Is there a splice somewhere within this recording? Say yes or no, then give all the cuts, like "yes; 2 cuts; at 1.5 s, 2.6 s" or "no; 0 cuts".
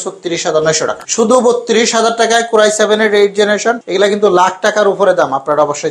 yes; 2 cuts; at 1.0 s, 3.8 s